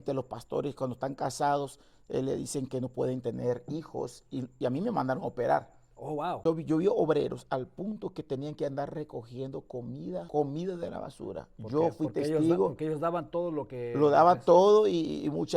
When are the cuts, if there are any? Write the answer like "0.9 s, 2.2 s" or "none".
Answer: 6.4 s, 10.3 s